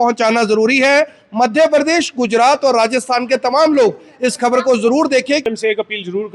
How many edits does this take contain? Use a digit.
1